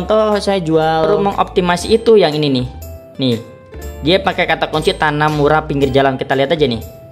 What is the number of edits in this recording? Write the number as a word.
one